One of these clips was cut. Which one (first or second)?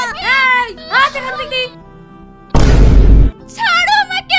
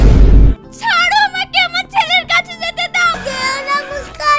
second